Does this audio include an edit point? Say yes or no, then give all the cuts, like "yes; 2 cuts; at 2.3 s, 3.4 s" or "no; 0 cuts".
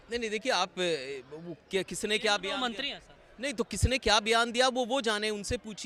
no; 0 cuts